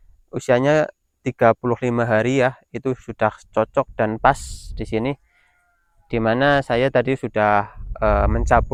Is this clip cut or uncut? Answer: uncut